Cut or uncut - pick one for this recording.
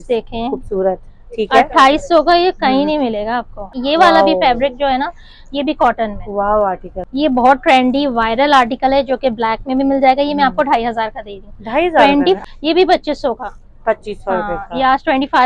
cut